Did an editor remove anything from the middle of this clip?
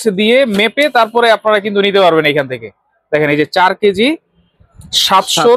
no; 0 cuts

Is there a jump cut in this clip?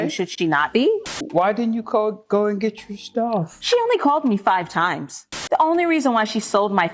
yes; 2 cuts; at 1.1 s, 5.3 s

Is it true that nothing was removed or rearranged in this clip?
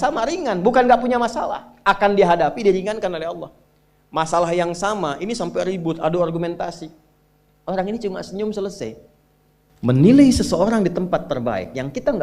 no; 1 cut; at 9.9 s

